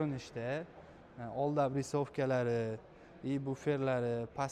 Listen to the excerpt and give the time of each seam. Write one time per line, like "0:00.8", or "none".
none